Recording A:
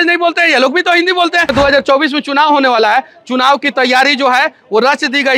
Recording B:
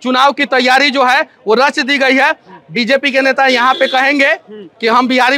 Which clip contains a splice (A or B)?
A